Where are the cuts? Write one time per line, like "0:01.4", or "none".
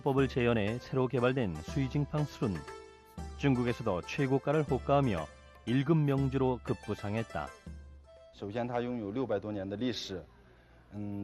0:04.4